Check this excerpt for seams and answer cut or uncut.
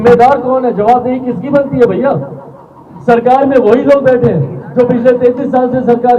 uncut